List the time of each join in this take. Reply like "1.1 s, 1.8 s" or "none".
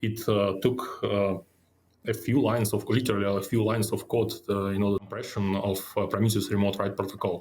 5.3 s